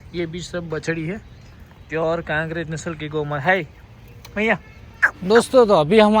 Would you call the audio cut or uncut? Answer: cut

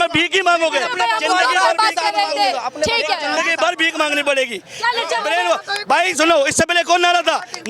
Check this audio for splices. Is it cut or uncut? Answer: uncut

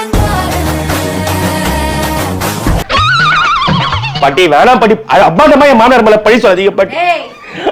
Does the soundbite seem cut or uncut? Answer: uncut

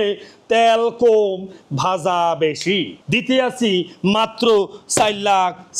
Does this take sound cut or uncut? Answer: cut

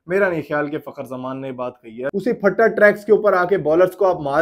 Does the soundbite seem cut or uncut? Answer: cut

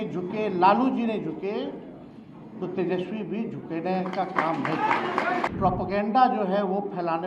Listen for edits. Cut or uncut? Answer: cut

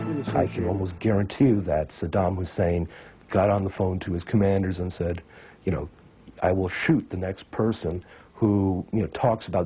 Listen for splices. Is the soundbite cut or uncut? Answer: cut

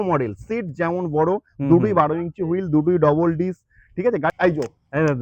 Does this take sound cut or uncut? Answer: cut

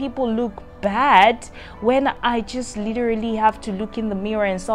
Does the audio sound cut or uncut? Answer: uncut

